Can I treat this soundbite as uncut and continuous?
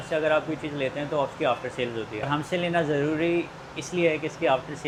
yes; 0 cuts

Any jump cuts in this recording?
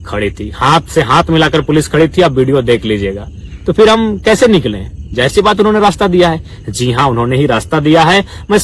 no; 0 cuts

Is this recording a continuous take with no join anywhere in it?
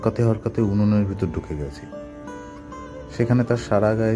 yes; 0 cuts

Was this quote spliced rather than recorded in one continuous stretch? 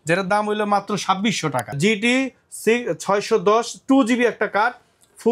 yes; 1 cut; at 1.7 s

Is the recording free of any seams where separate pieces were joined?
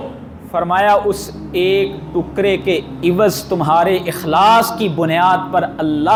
yes; 0 cuts

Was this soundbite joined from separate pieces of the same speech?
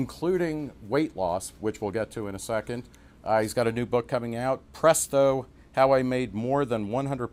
no; 0 cuts

